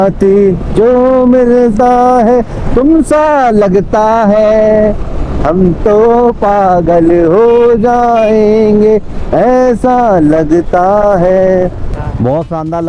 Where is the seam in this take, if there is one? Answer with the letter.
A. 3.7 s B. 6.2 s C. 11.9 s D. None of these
C